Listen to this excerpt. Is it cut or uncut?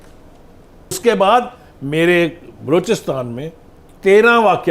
cut